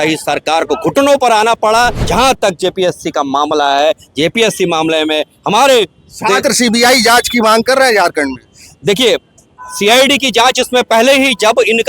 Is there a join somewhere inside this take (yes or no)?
yes